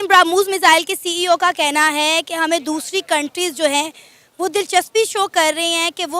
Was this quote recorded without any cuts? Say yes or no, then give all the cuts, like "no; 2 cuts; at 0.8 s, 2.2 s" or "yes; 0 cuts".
yes; 0 cuts